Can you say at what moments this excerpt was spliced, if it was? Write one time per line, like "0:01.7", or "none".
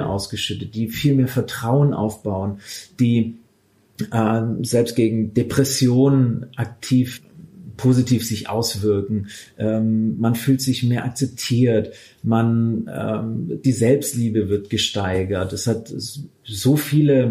none